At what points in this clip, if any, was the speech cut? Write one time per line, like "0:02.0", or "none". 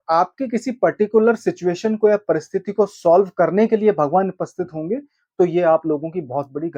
none